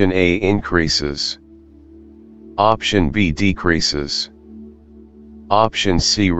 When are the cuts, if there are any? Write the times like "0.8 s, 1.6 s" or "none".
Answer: 1.2 s, 2.6 s